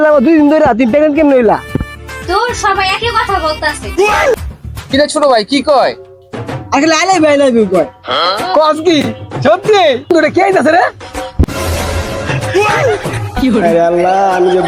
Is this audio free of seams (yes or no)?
no